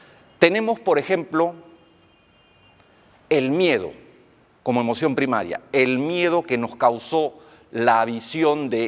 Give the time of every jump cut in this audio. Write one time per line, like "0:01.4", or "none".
none